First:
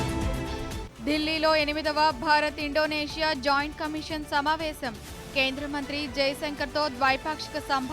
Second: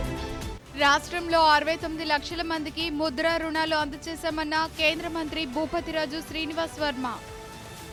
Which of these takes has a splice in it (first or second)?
first